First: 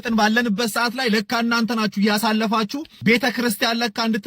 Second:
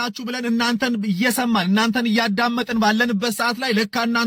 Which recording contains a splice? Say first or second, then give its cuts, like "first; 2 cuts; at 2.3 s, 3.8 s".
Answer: first; 1 cut; at 2.9 s